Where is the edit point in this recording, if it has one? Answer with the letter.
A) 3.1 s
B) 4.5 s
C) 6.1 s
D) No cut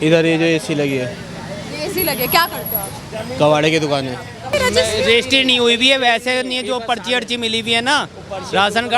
B